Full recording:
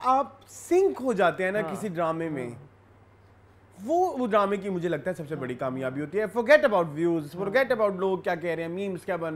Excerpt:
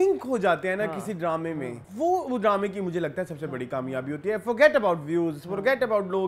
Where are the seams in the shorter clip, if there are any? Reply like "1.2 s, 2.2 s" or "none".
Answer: 1.8 s